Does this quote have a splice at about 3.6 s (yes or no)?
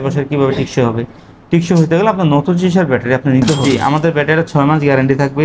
yes